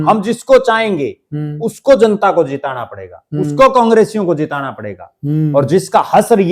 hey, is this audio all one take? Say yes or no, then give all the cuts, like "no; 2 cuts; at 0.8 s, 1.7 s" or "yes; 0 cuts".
yes; 0 cuts